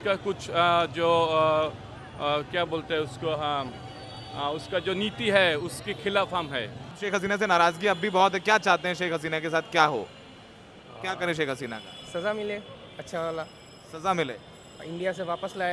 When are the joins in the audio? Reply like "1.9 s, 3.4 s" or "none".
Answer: 7.0 s